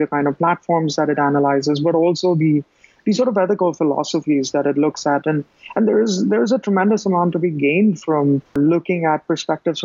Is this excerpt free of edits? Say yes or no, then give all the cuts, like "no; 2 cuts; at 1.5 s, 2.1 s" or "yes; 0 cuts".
yes; 0 cuts